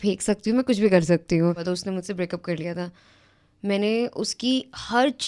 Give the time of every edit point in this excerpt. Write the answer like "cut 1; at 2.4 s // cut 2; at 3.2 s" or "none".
cut 1; at 1.6 s